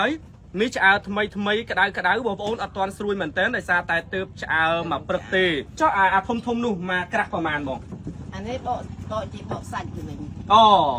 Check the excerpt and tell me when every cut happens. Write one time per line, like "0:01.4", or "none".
0:05.8